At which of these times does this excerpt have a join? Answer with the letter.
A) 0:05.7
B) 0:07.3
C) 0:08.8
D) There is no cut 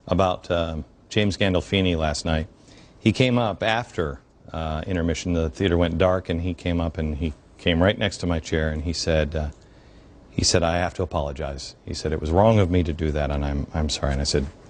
D